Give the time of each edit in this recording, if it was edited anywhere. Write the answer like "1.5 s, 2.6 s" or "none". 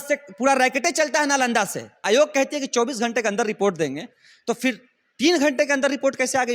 2.0 s